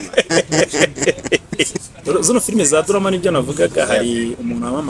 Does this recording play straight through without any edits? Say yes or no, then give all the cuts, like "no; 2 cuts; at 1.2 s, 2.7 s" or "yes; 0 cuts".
no; 1 cut; at 2.0 s